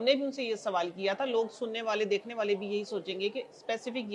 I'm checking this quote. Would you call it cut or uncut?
uncut